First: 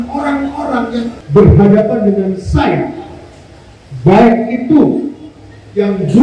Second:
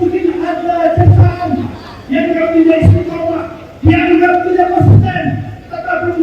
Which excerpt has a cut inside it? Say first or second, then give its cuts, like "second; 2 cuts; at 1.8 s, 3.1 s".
first; 1 cut; at 1.2 s